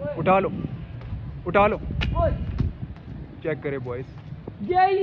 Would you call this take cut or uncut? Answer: uncut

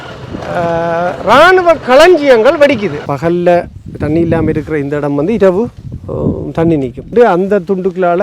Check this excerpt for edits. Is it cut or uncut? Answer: cut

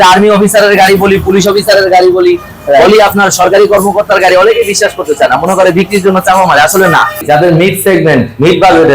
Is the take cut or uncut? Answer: cut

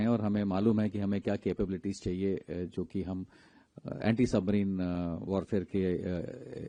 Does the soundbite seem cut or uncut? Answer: uncut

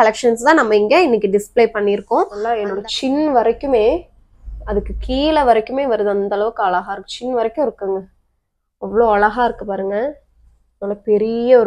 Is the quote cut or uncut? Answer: cut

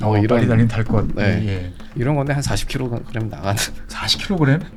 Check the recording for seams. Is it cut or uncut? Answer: uncut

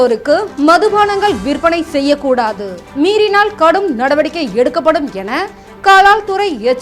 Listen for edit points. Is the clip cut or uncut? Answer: uncut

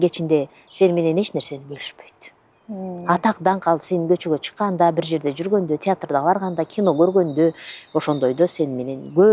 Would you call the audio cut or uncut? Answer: uncut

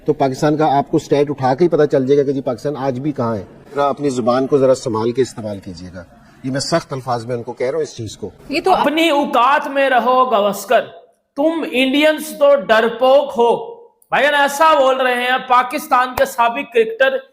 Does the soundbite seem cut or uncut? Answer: cut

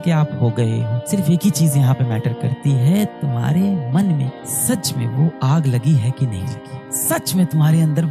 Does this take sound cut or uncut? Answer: cut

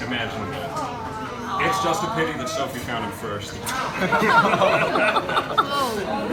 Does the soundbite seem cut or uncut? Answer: uncut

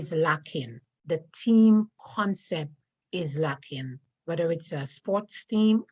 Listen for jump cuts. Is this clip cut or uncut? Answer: uncut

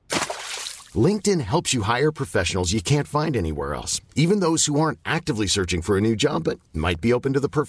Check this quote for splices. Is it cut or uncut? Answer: uncut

